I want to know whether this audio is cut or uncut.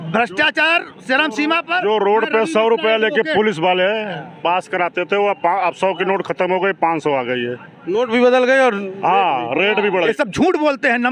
cut